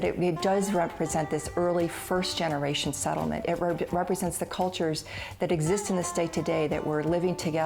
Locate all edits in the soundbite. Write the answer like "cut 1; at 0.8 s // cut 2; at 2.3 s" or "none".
none